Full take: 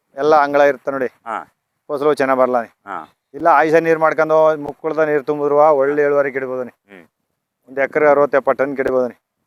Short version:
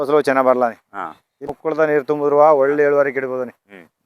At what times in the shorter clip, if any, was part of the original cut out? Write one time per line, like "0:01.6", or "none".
0:01.4